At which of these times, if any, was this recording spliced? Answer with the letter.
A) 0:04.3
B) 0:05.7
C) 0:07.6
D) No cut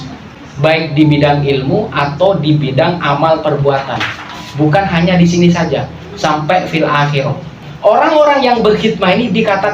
C